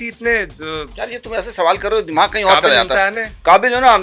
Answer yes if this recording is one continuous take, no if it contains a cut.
yes